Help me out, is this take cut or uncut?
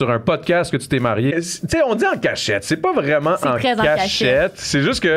cut